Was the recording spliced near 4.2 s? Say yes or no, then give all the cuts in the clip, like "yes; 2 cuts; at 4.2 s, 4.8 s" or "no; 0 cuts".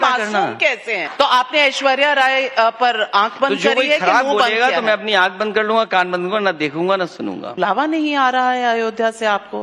no; 2 cuts; at 1.1 s, 7.4 s